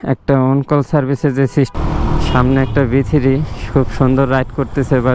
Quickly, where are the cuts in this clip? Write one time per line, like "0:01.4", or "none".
0:01.7